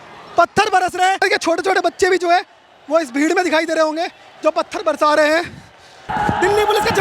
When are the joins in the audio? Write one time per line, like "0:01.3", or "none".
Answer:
0:01.2
0:06.1